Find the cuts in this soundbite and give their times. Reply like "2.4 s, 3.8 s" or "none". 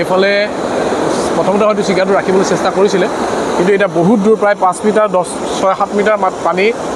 none